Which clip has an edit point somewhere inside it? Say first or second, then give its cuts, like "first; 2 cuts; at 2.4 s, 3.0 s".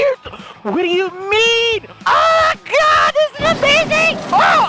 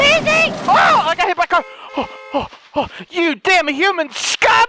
first; 1 cut; at 1.9 s